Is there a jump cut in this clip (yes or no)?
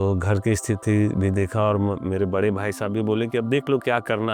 no